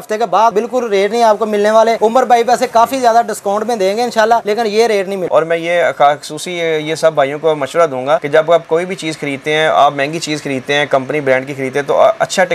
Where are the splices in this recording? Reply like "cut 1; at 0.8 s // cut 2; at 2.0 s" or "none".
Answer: none